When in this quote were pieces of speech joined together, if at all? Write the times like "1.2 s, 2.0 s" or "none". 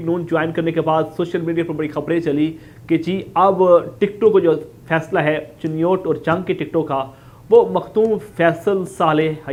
none